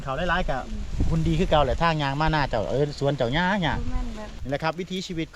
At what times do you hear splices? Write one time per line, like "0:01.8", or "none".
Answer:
0:04.3